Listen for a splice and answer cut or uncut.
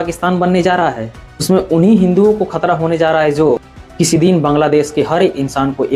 uncut